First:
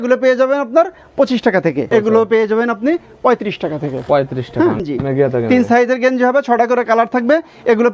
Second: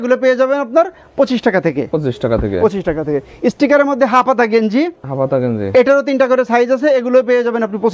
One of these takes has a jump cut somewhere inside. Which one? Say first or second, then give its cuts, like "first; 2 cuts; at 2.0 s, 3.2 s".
first; 2 cuts; at 1.9 s, 4.8 s